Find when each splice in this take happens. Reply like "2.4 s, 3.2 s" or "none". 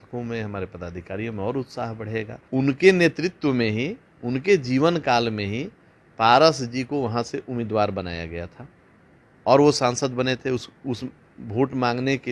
2.4 s